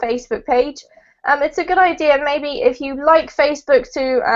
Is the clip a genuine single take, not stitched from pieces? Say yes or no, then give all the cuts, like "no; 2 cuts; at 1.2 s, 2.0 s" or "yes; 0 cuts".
no; 1 cut; at 1.5 s